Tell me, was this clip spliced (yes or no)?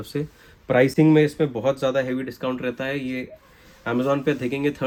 no